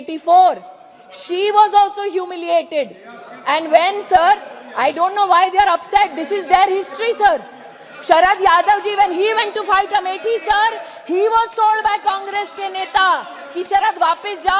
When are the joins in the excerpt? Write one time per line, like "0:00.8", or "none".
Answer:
none